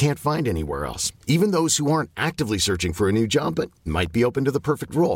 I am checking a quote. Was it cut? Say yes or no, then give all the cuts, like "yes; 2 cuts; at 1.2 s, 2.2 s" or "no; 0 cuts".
no; 0 cuts